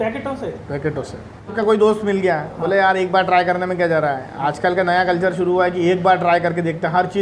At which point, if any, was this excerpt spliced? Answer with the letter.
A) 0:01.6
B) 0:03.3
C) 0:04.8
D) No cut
A